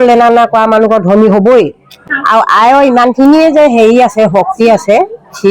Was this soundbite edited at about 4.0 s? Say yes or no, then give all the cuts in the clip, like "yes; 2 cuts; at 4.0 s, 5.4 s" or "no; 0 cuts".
no; 1 cut; at 2.0 s